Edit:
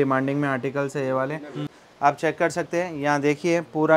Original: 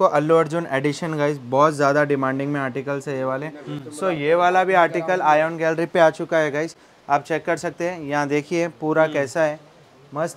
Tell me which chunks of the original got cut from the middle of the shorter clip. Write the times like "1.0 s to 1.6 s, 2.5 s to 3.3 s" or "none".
3.9 s to 6.8 s